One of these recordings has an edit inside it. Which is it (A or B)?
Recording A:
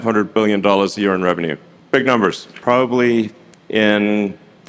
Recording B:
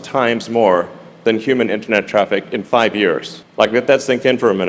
A